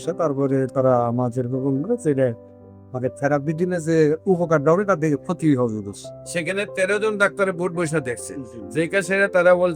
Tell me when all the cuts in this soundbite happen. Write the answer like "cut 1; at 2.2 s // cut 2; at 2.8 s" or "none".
none